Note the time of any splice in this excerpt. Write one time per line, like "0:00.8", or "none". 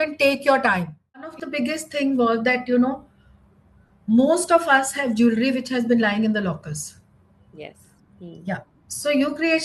0:01.4